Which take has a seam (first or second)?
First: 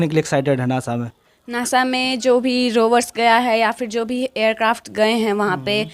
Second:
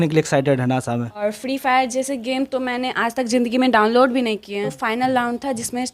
second